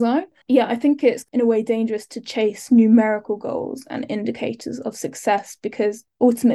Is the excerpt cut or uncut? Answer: cut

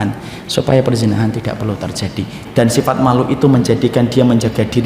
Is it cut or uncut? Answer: cut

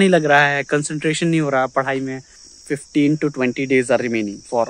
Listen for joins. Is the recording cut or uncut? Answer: cut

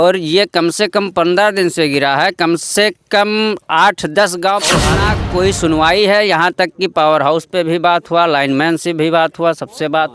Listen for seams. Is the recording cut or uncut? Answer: cut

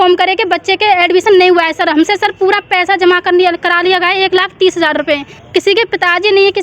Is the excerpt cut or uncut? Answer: cut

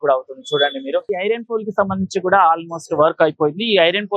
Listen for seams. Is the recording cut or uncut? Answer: cut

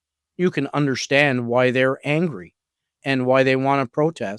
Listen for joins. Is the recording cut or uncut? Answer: uncut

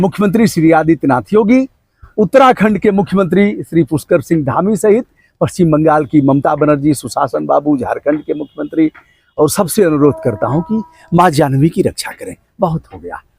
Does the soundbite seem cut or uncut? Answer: uncut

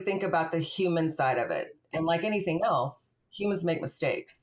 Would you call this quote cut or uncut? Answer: cut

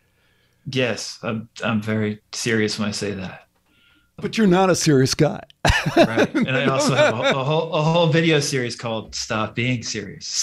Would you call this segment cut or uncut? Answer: cut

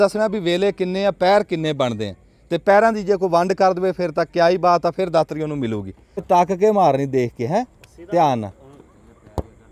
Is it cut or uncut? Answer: cut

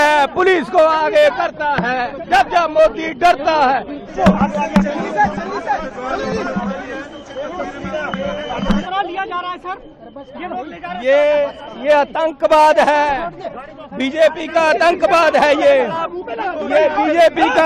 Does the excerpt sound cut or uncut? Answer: uncut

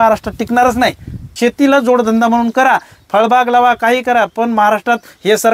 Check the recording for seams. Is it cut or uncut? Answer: cut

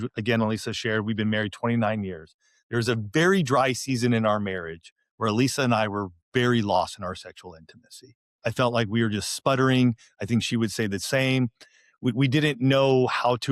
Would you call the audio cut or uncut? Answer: uncut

